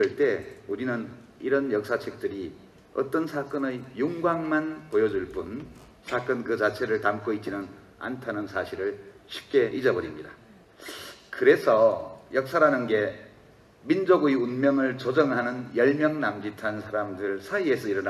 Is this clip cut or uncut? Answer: cut